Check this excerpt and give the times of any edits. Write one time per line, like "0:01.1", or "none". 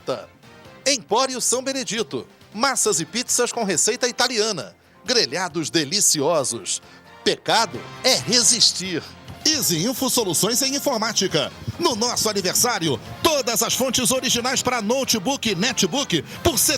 none